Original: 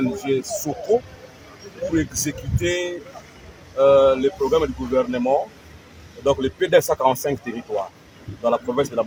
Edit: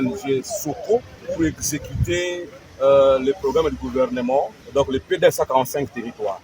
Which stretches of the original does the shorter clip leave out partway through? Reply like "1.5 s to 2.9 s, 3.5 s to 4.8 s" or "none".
1.1 s to 1.7 s, 3.1 s to 3.5 s, 5.6 s to 6.1 s